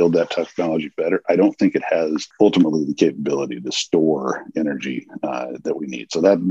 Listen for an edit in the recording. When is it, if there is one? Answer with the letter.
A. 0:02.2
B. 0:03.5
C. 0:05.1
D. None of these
A